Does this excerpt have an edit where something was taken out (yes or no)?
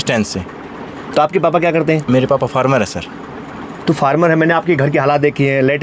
no